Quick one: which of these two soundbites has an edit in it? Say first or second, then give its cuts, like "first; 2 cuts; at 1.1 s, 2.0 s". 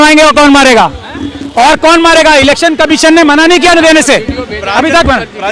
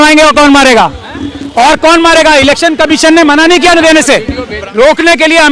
second; 1 cut; at 4.5 s